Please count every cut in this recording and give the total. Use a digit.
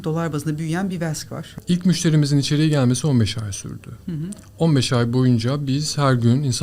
1